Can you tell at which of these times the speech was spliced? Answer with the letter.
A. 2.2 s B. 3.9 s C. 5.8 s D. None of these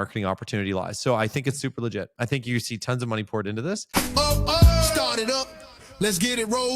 B